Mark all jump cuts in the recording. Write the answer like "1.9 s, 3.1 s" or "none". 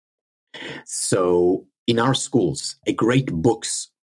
2.8 s

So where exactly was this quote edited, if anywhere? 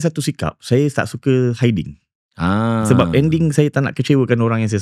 none

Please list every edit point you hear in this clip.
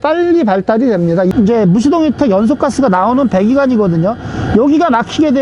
1.3 s

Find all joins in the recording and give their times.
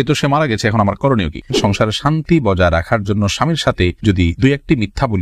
1.5 s

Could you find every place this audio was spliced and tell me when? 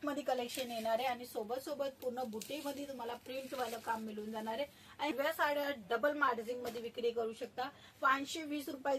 5.1 s

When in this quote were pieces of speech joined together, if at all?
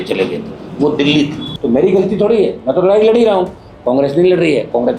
1.5 s, 3.7 s

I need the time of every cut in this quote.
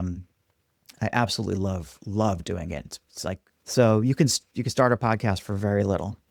3.5 s

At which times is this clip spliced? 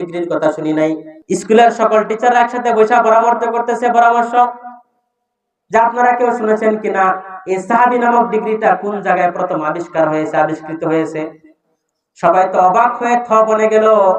1.1 s

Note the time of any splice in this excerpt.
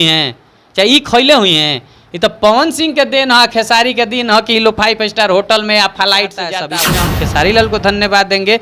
6.6 s

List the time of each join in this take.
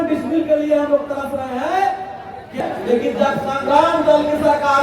2.6 s

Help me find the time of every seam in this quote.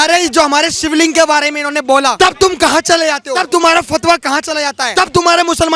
2.1 s, 3.3 s, 4.8 s

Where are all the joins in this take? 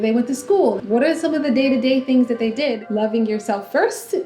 0.8 s, 2.8 s

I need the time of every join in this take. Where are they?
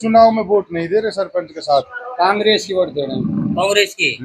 2.0 s

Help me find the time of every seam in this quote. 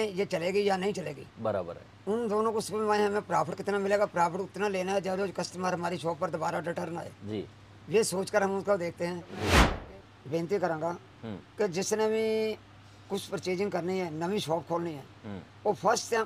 9.7 s

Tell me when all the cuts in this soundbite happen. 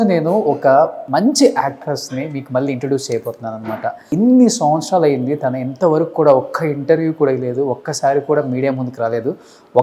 1.0 s, 4.0 s

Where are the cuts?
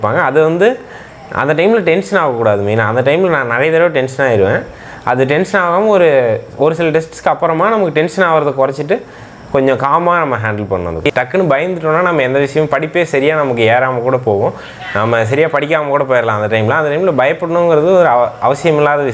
11.0 s

